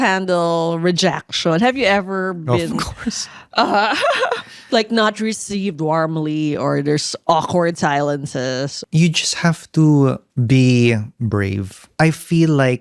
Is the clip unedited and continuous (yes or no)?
no